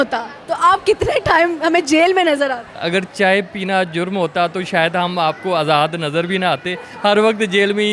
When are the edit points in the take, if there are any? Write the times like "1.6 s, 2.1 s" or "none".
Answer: 2.7 s